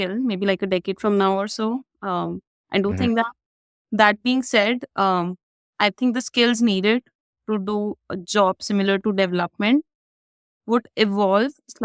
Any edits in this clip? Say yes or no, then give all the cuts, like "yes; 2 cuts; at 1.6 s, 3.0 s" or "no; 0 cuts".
no; 0 cuts